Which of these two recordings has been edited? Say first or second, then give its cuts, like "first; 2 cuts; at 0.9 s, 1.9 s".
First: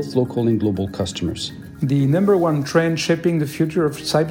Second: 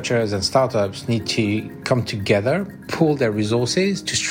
first; 1 cut; at 1.5 s